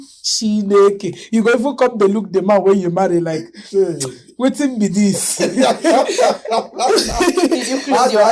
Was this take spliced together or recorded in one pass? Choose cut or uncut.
uncut